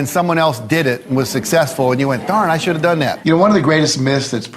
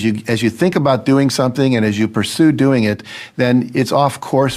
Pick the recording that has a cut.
first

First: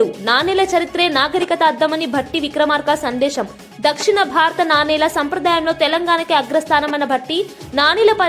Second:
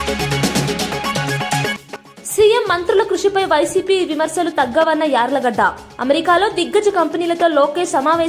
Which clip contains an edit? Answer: second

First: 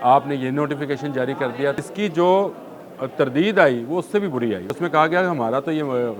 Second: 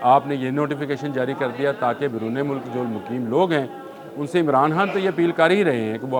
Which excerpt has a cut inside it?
first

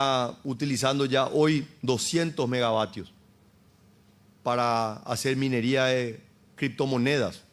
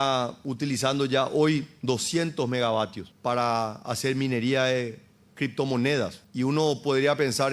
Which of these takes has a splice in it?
second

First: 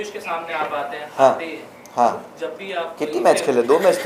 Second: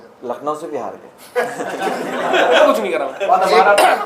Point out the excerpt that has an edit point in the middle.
second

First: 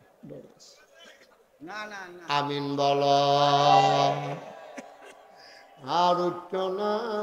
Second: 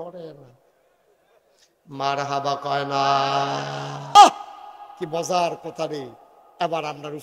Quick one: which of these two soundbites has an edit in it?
second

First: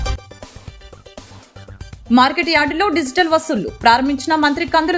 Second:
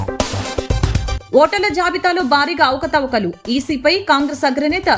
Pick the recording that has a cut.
second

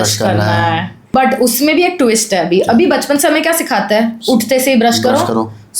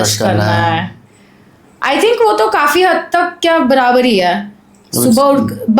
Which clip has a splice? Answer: first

